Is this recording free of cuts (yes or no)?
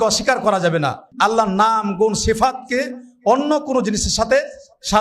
no